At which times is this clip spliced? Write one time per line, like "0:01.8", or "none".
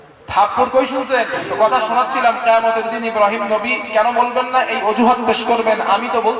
0:01.4

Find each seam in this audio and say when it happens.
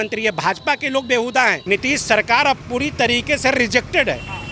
0:01.6

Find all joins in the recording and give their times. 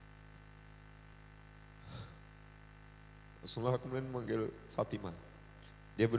0:01.1

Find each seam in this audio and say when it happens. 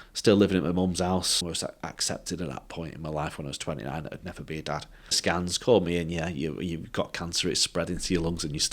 0:01.5
0:05.2

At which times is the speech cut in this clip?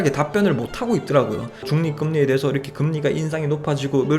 0:01.7

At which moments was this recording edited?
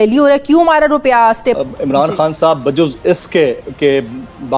0:01.6

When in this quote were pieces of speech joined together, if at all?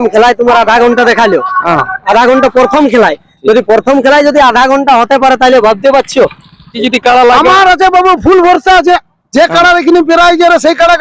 0:06.8

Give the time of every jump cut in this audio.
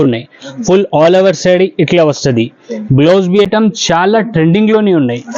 0:03.5

